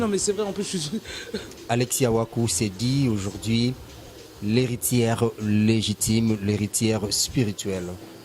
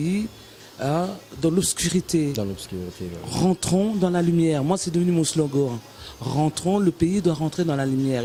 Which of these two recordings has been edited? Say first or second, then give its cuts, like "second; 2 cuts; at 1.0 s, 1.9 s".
first; 1 cut; at 1.5 s